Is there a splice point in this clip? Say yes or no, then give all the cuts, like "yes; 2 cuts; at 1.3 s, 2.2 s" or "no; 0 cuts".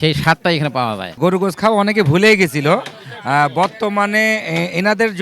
yes; 1 cut; at 1.2 s